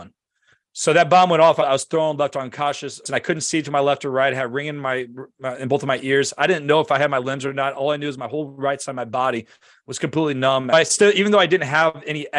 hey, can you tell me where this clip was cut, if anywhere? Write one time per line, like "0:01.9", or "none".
0:03.1
0:10.7